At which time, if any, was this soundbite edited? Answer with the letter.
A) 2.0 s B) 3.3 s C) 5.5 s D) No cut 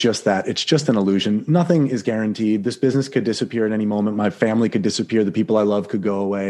D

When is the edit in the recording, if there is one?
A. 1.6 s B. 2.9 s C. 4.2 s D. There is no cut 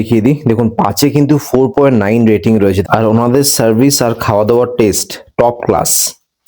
D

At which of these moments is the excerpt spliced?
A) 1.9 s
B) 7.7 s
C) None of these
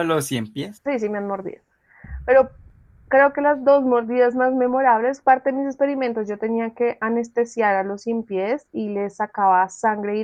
C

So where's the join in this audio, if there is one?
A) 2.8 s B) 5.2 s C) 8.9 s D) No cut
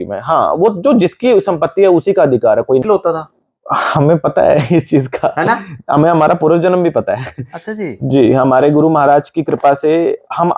A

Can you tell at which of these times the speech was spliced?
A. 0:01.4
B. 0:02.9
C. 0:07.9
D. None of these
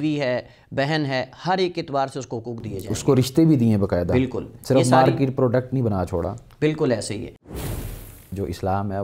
C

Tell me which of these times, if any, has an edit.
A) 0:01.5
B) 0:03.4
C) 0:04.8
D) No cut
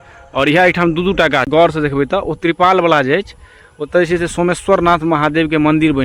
A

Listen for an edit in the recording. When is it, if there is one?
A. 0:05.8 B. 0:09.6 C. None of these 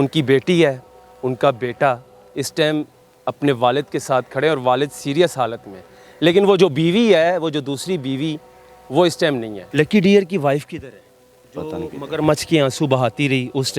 B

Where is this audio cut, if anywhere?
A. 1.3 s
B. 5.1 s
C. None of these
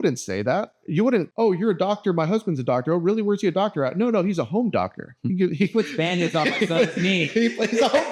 A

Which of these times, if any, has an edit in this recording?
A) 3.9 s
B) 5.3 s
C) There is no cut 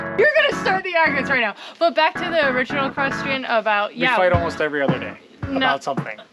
C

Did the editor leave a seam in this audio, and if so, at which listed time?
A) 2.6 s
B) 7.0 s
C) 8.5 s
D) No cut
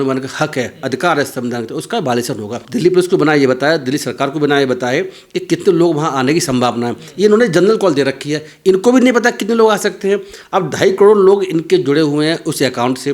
A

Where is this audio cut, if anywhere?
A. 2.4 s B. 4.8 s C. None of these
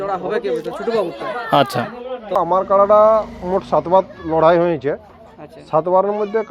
A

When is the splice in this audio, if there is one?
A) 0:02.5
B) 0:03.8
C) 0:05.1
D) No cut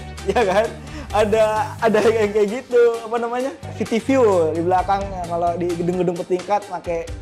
B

